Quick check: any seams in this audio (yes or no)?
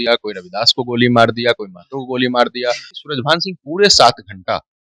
yes